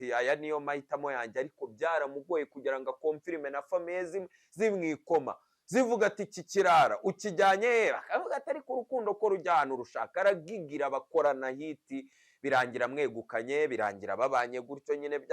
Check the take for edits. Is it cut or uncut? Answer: uncut